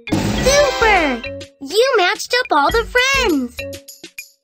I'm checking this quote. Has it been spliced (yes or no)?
yes